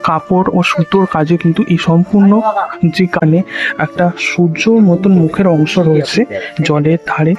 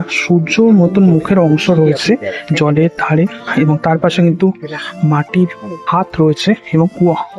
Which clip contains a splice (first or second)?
first